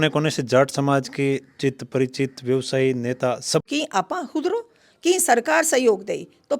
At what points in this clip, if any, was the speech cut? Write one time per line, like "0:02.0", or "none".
0:03.6